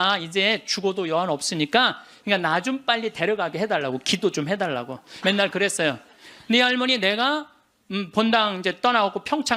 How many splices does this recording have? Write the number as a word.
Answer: two